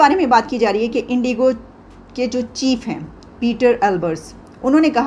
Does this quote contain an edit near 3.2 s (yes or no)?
no